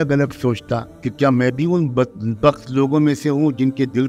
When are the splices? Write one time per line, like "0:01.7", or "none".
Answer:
0:01.0